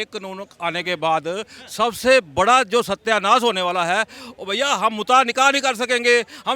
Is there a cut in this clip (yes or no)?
no